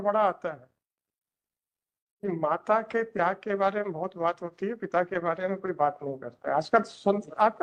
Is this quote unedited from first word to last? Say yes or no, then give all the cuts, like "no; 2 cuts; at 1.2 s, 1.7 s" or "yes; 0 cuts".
yes; 0 cuts